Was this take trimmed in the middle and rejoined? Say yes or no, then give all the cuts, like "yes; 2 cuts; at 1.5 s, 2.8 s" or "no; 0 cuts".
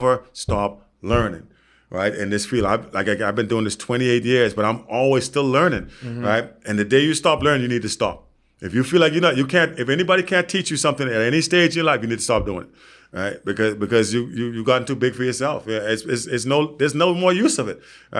no; 0 cuts